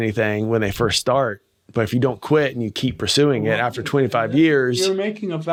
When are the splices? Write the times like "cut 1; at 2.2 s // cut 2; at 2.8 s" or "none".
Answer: none